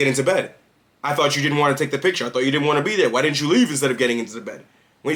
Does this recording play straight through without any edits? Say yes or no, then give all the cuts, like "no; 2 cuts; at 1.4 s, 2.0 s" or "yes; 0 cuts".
yes; 0 cuts